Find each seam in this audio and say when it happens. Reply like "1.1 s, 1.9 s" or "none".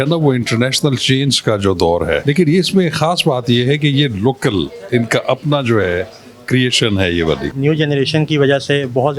2.2 s, 7.5 s